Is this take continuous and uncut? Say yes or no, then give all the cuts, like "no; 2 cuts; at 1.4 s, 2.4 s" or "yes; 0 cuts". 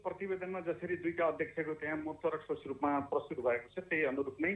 yes; 0 cuts